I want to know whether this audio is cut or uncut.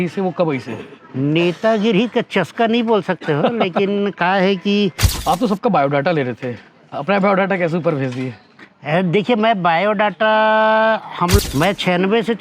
cut